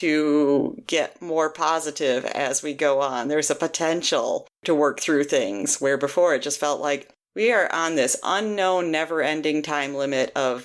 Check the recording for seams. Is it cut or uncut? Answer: uncut